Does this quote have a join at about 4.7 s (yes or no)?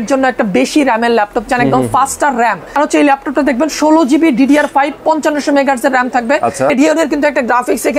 no